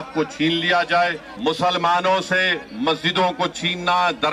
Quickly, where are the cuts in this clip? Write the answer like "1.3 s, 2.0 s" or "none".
1.3 s